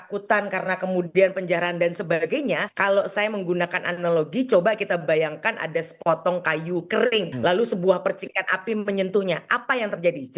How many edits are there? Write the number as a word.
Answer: two